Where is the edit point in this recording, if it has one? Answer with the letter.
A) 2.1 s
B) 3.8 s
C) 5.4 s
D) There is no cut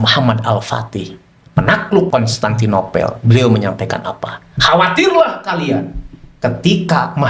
A